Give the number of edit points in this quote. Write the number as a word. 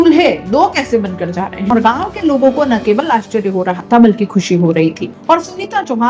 two